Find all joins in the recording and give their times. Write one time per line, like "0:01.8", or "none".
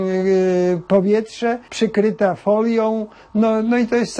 0:01.7